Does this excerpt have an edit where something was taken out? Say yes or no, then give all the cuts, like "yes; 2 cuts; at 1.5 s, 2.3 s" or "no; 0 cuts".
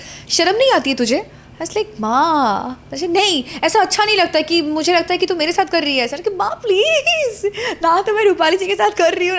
no; 0 cuts